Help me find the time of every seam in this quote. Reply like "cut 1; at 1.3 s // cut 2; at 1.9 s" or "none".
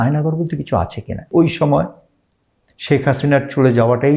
cut 1; at 1.3 s